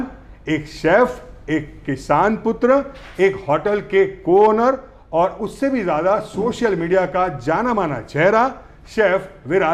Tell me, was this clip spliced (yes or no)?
no